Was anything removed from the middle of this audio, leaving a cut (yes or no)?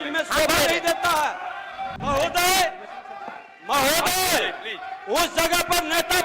yes